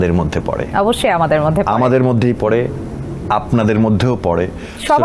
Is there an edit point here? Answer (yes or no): no